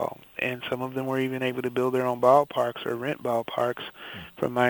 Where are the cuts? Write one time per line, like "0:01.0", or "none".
none